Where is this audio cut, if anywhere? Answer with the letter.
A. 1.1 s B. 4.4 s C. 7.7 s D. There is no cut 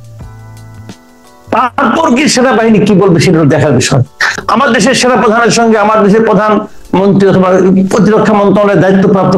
B